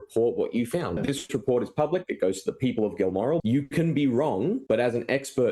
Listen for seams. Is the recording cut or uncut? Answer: cut